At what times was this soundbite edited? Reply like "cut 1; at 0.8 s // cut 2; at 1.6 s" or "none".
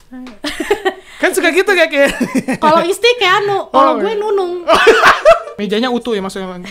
cut 1; at 5.5 s